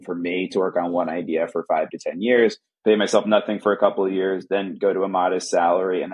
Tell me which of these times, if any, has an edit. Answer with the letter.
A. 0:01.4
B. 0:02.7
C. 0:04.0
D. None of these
D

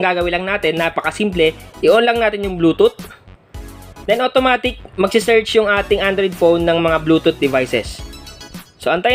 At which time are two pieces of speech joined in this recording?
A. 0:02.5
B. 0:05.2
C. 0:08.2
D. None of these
D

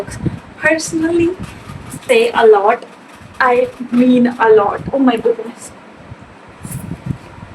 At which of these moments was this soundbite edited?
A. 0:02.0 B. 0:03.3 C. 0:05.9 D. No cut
A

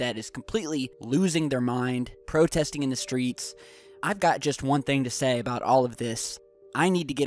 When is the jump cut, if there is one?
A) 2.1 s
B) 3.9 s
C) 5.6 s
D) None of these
A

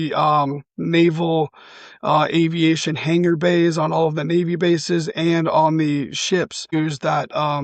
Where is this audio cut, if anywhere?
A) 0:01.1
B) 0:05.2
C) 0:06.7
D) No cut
C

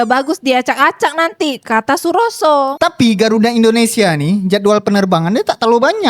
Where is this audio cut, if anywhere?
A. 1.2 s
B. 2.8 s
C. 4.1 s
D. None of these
B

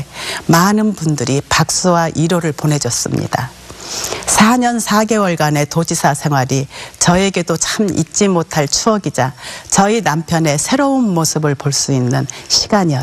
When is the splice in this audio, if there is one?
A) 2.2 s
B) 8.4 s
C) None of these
C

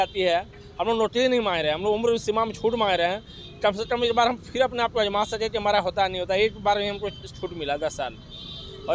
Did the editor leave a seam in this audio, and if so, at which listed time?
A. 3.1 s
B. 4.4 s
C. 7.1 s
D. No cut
D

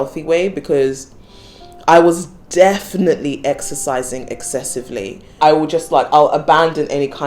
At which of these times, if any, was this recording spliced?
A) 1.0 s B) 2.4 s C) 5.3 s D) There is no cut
C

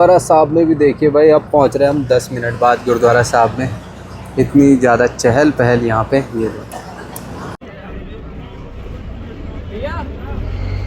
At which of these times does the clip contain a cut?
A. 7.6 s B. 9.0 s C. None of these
A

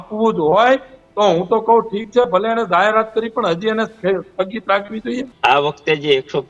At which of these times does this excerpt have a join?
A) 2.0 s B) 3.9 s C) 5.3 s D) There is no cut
C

